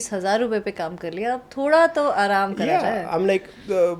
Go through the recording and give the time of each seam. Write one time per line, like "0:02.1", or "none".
none